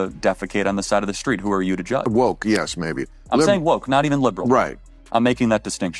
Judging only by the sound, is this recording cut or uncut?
cut